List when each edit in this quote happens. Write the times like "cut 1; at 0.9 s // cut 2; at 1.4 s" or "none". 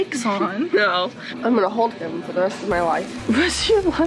cut 1; at 1.3 s